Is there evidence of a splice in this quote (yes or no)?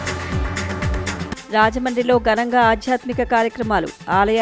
yes